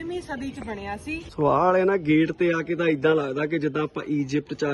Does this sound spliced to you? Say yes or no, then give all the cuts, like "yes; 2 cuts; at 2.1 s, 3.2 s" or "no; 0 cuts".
yes; 1 cut; at 1.3 s